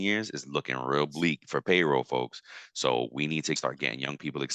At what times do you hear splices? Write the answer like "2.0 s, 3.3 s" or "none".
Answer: 3.6 s